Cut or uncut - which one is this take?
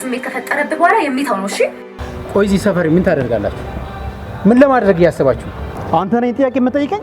cut